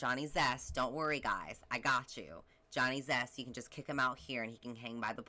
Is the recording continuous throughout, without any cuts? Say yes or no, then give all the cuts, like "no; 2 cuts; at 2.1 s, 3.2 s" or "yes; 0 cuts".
yes; 0 cuts